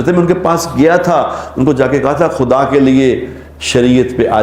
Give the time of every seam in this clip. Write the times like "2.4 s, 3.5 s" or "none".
none